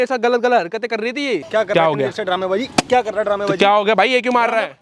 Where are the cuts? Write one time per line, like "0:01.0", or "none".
0:01.5